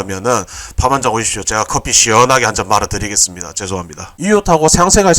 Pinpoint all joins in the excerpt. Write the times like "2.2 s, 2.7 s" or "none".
4.2 s